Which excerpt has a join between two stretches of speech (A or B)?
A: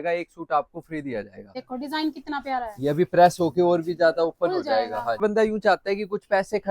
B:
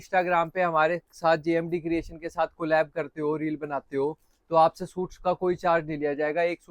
A